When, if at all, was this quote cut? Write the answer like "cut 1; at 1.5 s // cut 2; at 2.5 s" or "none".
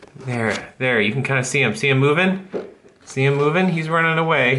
none